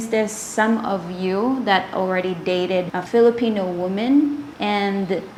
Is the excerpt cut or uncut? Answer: uncut